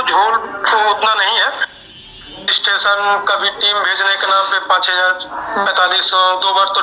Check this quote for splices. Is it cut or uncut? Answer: uncut